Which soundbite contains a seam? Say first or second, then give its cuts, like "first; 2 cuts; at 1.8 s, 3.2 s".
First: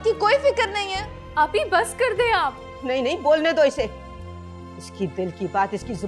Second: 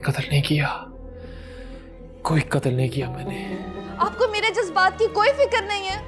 second; 1 cut; at 3.8 s